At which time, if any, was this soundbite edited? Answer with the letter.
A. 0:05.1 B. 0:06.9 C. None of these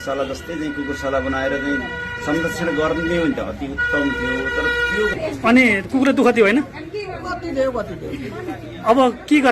A